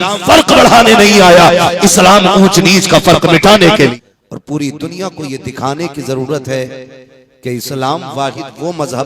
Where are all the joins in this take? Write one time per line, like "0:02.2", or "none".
0:03.9